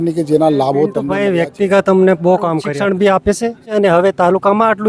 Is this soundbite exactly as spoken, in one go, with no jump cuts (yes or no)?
no